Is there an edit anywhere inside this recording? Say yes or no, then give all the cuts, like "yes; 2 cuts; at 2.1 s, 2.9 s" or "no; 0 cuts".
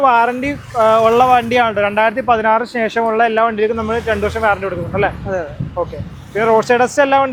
no; 0 cuts